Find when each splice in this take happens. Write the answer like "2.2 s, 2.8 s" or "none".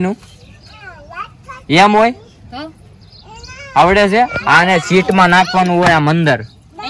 none